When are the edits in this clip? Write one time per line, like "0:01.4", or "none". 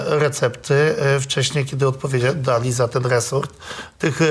none